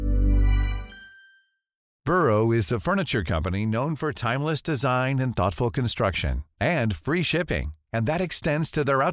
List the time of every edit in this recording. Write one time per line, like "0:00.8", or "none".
0:02.0